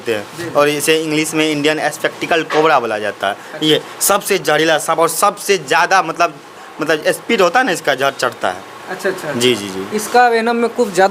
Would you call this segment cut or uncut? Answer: uncut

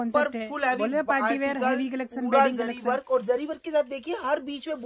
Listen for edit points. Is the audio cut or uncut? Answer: uncut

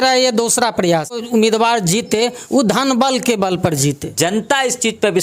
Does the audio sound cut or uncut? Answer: cut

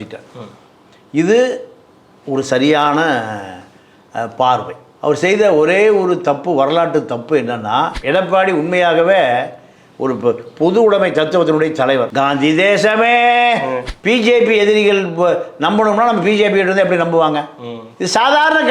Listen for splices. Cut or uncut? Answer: cut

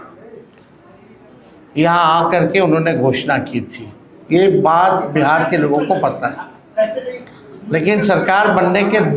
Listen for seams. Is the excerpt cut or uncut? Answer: uncut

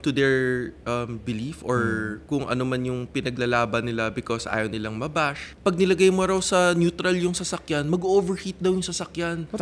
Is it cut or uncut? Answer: cut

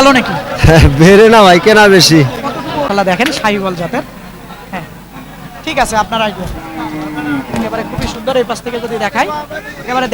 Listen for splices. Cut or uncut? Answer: cut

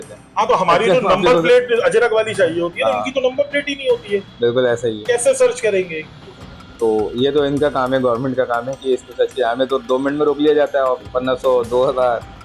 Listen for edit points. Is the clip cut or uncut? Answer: uncut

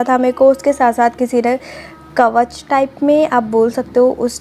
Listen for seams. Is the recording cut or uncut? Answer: uncut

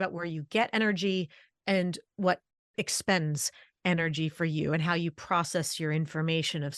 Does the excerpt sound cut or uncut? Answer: cut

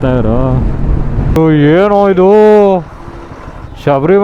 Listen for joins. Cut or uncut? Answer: cut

